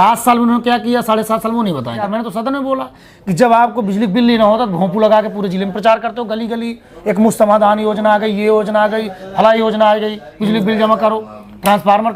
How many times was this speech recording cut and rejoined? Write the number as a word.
one